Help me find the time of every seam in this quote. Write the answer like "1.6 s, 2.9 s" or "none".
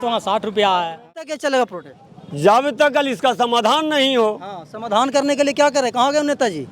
1.3 s